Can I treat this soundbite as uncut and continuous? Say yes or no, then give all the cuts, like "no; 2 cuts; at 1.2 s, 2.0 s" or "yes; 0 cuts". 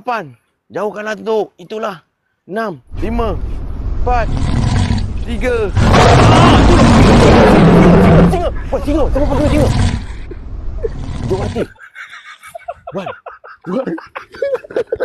yes; 0 cuts